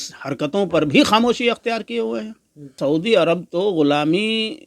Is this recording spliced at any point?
yes; 1 cut; at 2.8 s

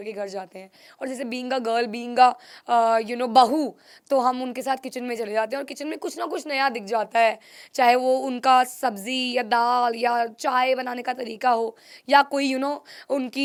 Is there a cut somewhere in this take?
no; 0 cuts

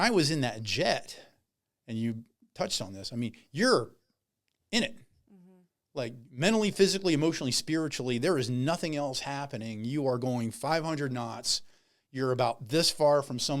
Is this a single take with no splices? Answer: yes; 0 cuts

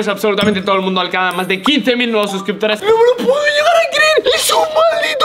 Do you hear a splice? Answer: yes; 2 cuts; at 2.8 s, 4.2 s

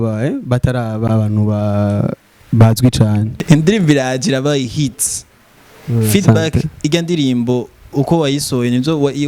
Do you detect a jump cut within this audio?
yes; 1 cut; at 3.4 s

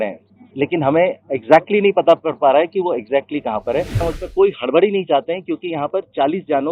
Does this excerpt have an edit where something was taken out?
yes; 1 cut; at 4.0 s

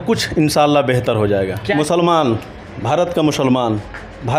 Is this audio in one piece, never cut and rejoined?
no; 1 cut; at 1.6 s

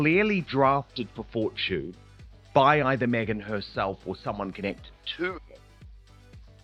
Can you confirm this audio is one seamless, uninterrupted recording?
yes; 0 cuts

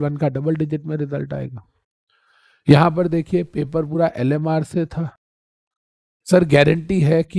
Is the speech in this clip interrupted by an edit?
no; 0 cuts

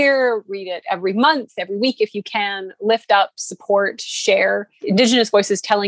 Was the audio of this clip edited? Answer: yes; 1 cut; at 4.7 s

